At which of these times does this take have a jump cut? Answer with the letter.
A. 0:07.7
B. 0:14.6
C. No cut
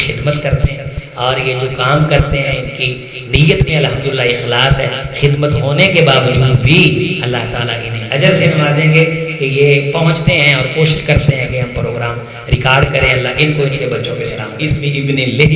B